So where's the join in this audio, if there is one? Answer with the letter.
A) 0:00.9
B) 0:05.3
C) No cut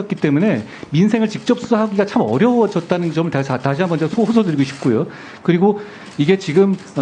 C